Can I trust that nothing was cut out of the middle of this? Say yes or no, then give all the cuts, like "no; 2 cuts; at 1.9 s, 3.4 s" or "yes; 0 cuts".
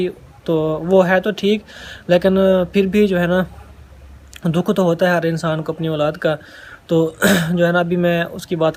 yes; 0 cuts